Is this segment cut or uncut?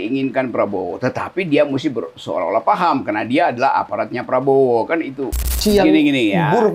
cut